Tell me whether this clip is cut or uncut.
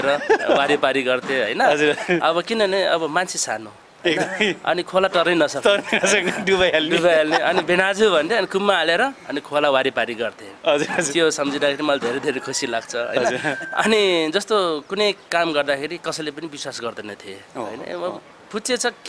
uncut